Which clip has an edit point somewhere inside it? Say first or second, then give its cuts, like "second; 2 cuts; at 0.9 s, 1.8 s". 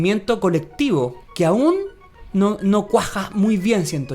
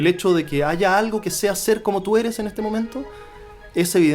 first; 1 cut; at 1.2 s